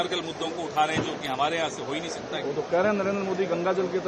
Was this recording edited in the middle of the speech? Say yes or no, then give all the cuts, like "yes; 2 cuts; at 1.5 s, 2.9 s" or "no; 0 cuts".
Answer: no; 0 cuts